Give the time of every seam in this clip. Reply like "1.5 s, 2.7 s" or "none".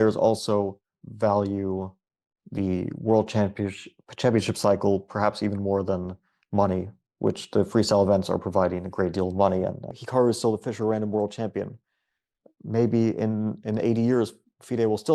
10.0 s